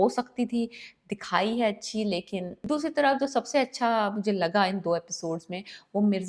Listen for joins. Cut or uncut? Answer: cut